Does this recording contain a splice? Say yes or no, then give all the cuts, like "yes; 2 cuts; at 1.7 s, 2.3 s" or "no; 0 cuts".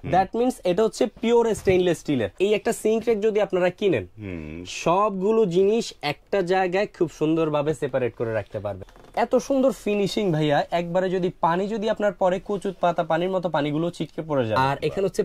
yes; 3 cuts; at 2.3 s, 8.8 s, 14.6 s